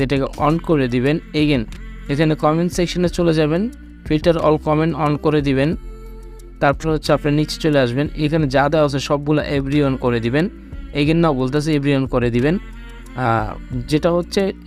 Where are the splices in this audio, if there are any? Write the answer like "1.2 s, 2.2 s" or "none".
none